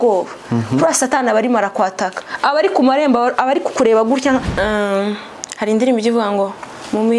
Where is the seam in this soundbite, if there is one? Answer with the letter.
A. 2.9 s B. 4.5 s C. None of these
B